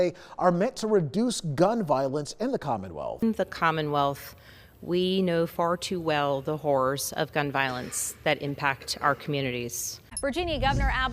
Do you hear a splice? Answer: yes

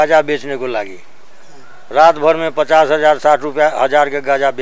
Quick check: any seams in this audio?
no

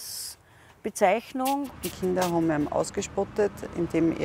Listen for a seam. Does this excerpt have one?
yes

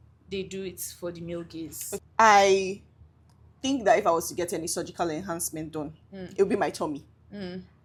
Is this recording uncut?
yes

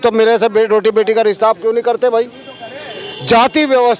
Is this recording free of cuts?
yes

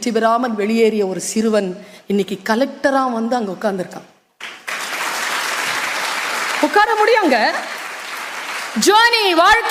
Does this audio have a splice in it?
no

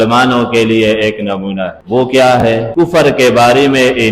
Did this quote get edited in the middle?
yes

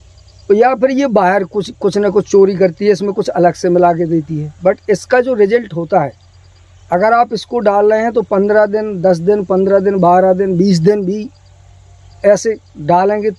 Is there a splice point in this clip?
no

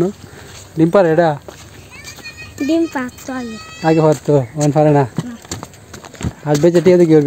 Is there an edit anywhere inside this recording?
yes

